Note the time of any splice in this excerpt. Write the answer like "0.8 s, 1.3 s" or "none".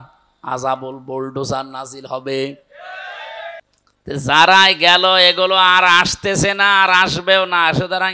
3.6 s